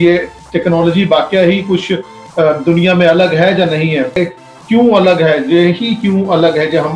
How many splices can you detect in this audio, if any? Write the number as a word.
one